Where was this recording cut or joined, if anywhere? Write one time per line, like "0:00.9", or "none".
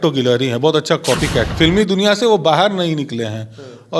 0:01.5